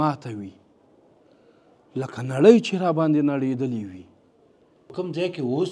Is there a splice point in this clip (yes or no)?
yes